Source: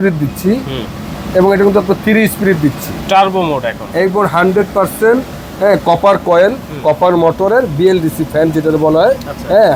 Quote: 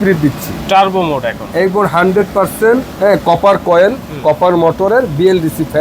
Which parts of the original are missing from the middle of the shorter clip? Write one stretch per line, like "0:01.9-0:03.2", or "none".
0:05.3-0:05.5

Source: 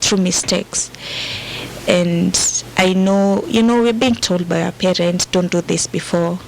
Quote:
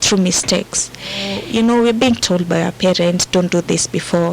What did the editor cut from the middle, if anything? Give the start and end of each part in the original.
0:01.4-0:03.4

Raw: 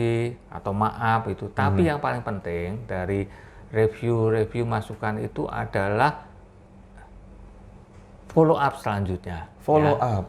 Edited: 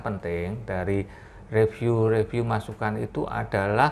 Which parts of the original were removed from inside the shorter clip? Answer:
none

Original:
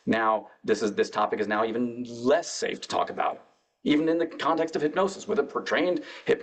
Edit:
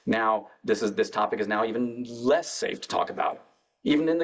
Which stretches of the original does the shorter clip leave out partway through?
none

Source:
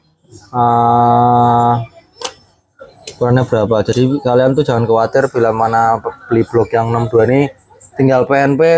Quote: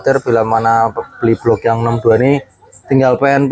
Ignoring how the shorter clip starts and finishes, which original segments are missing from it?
none

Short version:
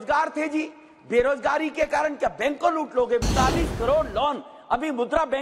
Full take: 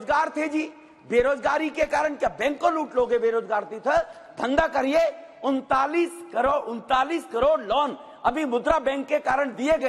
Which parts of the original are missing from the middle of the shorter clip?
0:03.2-0:06.8

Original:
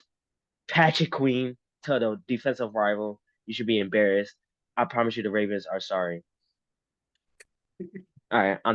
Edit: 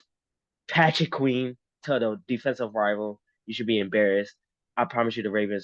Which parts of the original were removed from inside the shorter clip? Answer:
none

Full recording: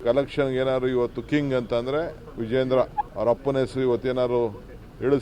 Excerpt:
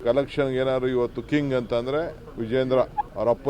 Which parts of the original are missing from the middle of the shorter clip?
none

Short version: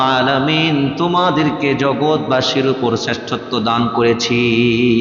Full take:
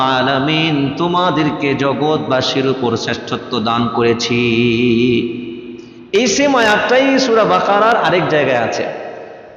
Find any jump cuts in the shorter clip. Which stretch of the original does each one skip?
none

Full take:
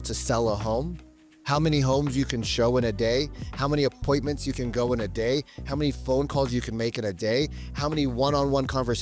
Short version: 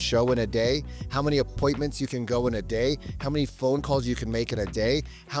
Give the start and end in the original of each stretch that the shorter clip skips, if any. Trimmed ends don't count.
none

